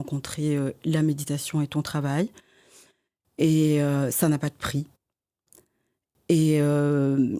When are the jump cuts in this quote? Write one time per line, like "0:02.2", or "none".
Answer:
none